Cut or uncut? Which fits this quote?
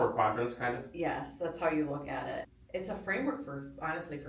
cut